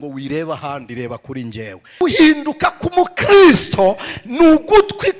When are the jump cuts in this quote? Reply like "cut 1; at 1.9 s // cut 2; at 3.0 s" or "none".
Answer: cut 1; at 2.0 s